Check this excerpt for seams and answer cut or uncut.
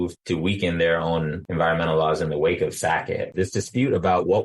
cut